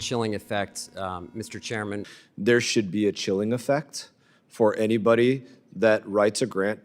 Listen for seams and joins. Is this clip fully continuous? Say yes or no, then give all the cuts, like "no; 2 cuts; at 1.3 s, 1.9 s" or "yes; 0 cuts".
no; 1 cut; at 2.1 s